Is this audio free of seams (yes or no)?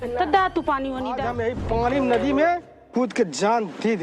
no